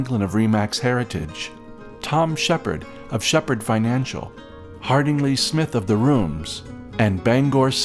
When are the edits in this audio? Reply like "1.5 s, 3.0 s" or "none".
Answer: none